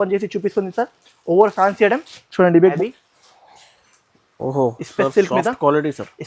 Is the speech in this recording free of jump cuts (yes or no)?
no